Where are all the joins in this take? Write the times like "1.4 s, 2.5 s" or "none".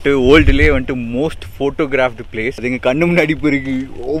2.6 s